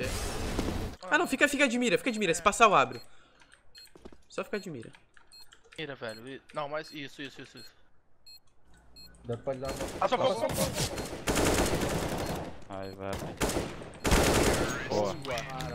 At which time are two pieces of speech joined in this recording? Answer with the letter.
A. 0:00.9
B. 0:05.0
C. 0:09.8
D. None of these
A